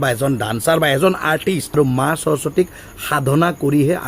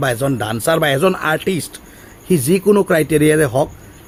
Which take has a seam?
first; 1 cut; at 1.7 s

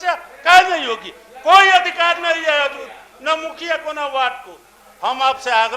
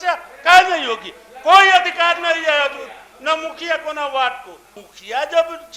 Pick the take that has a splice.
second; 1 cut; at 4.8 s

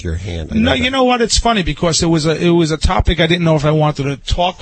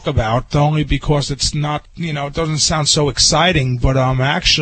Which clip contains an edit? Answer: second; 1 cut; at 1.9 s

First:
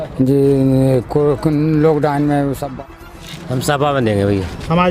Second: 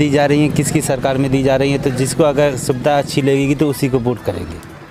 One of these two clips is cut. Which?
first; 1 cut; at 2.9 s

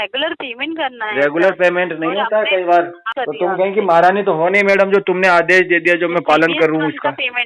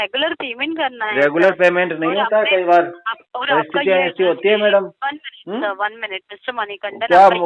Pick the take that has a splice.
first; 1 cut; at 3.0 s

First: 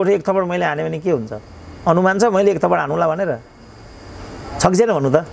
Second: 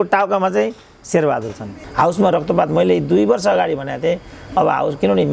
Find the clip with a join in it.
second; 1 cut; at 1.8 s

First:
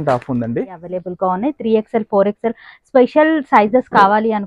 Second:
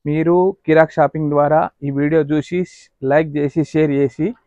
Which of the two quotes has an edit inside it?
first; 1 cut; at 1.0 s

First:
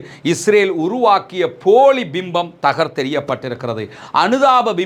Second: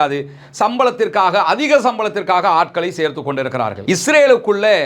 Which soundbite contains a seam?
second; 1 cut; at 3.8 s

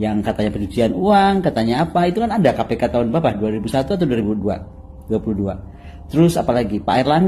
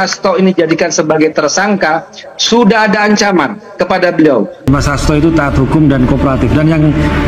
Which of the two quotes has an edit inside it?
second; 1 cut; at 4.7 s

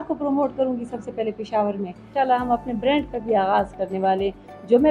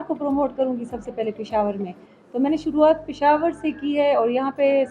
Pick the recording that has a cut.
first; 1 cut; at 2.1 s

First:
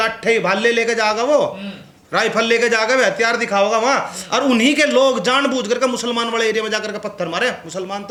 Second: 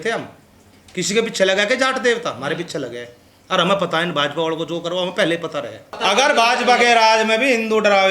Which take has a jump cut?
second; 1 cut; at 5.9 s

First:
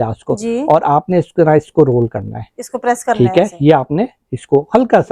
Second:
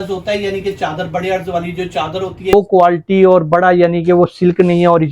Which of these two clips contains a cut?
second; 1 cut; at 2.5 s

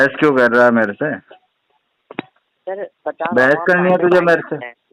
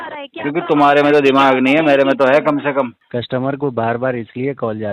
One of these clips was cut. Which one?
second; 1 cut; at 3.0 s

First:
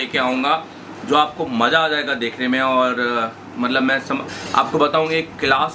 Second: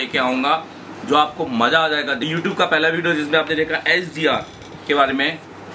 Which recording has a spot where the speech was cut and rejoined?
second; 1 cut; at 2.1 s

